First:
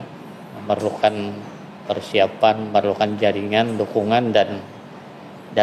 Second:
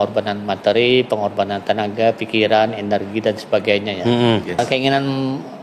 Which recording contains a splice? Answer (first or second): second